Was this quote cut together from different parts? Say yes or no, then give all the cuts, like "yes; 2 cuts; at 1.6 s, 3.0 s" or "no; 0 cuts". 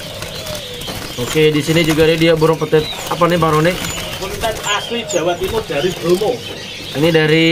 no; 0 cuts